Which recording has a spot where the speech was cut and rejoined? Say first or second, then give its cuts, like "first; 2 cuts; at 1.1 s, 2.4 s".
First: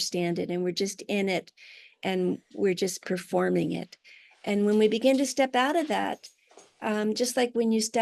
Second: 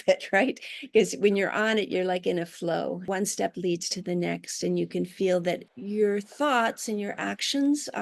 second; 2 cuts; at 3.1 s, 5.7 s